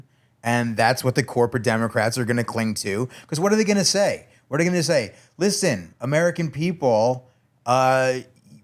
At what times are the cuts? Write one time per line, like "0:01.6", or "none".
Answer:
none